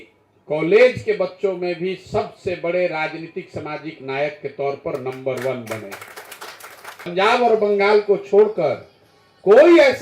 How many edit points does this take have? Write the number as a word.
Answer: one